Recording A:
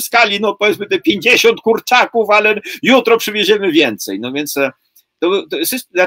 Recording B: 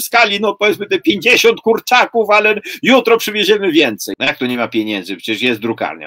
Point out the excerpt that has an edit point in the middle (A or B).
B